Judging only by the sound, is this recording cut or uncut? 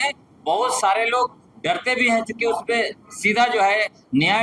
uncut